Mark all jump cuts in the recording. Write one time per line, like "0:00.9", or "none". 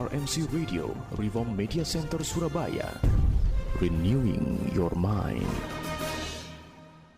none

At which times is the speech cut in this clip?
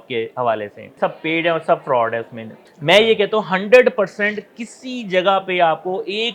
0:00.9
0:02.6

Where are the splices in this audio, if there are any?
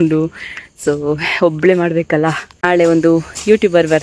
0:02.6

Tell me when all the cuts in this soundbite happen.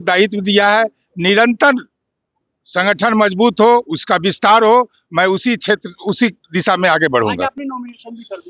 none

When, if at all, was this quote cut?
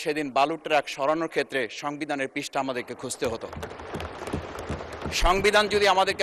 none

